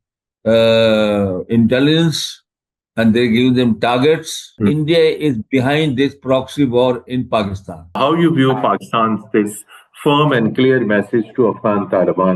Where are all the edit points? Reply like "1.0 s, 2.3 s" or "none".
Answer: 4.6 s, 8.0 s